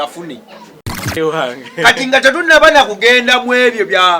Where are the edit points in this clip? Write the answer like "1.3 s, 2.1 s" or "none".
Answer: 1.2 s